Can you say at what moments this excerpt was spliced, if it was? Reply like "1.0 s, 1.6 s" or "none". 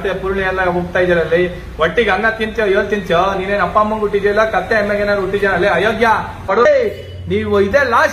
6.5 s